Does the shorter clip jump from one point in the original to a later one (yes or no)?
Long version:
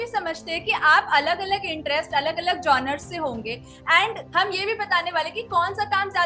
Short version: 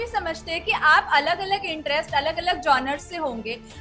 no